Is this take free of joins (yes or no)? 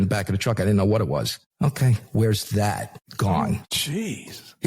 no